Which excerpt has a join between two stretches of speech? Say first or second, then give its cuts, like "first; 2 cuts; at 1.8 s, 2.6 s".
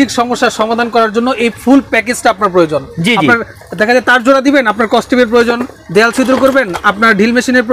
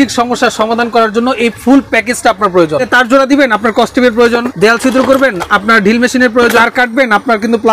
second; 3 cuts; at 2.9 s, 4.5 s, 6.6 s